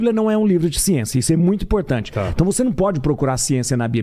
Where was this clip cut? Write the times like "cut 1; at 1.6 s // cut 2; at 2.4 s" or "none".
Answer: none